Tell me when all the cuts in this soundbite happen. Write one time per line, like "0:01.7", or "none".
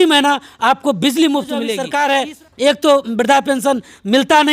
0:01.8

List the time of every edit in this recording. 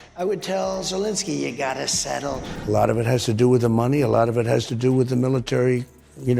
0:02.5

